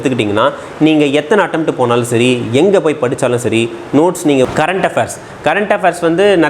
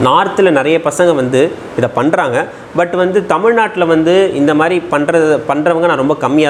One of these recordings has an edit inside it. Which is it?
first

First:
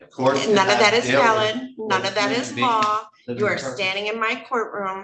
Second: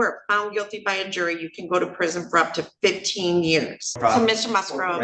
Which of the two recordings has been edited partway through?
second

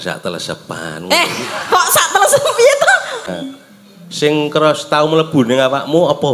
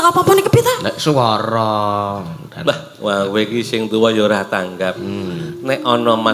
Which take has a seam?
first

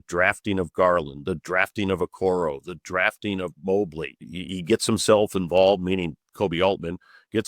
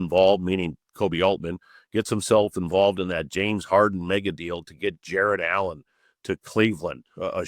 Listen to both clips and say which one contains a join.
first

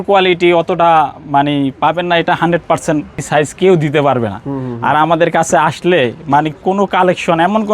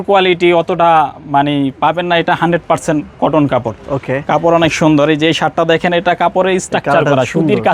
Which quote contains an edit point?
first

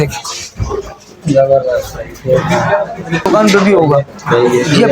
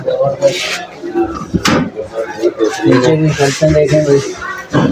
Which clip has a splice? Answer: first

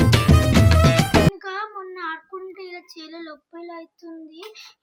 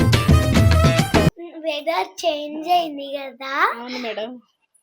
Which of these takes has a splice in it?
second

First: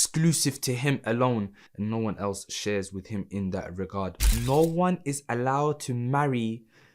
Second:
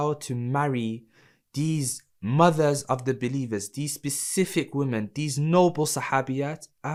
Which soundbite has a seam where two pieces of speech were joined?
first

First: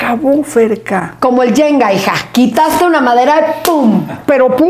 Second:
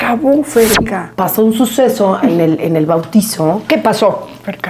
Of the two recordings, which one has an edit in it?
second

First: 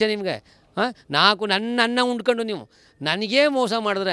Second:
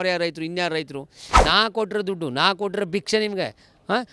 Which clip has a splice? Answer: second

